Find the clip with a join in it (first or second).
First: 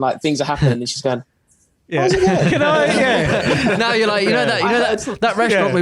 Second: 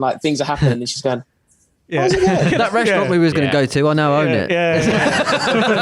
second